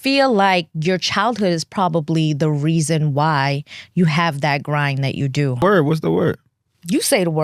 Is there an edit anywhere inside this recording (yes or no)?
yes